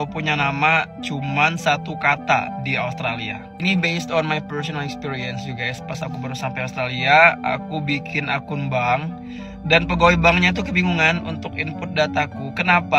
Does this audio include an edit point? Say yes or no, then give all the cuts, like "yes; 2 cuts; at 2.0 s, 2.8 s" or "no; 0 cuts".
no; 0 cuts